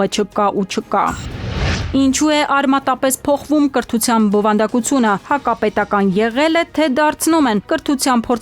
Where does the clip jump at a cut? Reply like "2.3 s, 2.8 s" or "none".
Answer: 1.8 s